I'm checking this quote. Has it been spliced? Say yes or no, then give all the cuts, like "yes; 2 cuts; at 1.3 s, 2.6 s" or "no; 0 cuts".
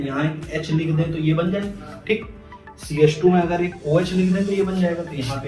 no; 0 cuts